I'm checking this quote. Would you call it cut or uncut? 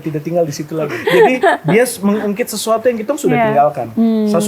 cut